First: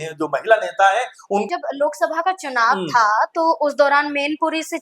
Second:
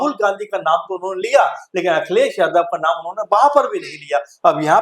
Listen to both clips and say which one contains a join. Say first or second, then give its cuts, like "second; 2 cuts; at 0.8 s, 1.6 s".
first; 1 cut; at 1.5 s